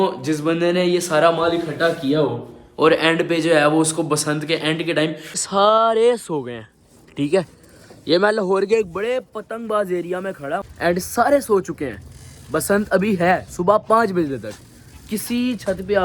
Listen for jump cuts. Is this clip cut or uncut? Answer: cut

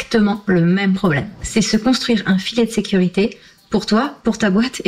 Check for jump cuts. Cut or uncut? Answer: cut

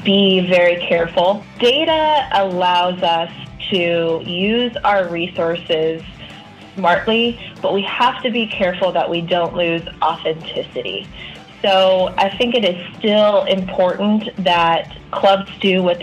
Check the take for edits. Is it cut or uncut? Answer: cut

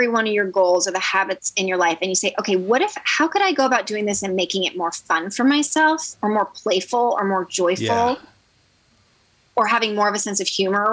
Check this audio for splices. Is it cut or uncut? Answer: uncut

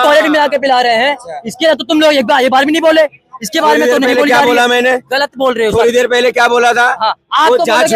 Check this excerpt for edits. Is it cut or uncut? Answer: uncut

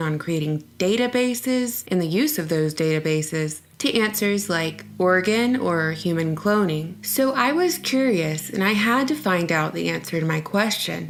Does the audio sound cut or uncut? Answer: uncut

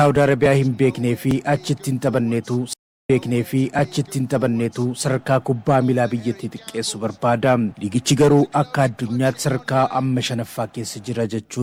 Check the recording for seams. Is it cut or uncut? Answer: uncut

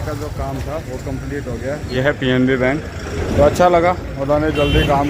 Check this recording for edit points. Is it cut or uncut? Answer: cut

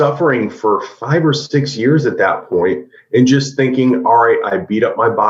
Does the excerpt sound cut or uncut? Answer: uncut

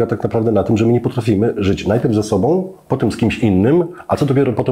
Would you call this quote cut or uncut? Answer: uncut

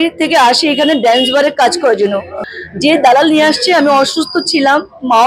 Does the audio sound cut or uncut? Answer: cut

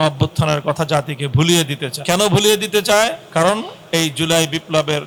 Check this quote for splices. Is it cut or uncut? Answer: uncut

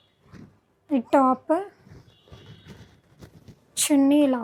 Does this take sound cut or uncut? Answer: uncut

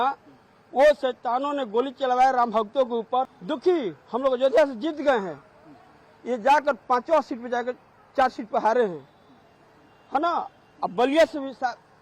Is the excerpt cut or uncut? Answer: uncut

